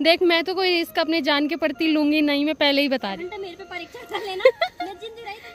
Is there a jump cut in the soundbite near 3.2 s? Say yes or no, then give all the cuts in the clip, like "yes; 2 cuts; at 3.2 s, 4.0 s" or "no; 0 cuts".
yes; 1 cut; at 3.2 s